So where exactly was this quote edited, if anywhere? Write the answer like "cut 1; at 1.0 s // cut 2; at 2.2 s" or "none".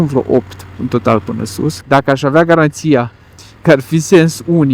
cut 1; at 1.8 s